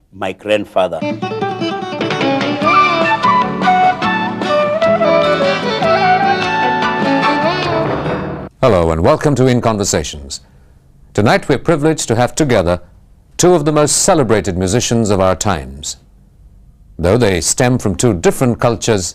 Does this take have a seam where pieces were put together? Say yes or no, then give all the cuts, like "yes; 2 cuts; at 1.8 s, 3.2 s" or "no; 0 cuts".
yes; 1 cut; at 16.4 s